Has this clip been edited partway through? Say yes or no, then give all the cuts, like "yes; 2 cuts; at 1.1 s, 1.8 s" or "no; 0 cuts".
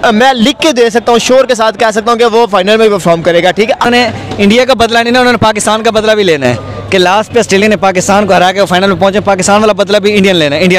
yes; 1 cut; at 3.8 s